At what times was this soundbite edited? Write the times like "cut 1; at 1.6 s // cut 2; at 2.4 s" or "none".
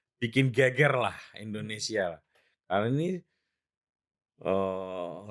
none